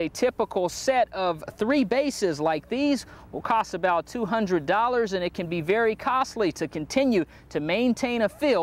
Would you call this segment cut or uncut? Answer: uncut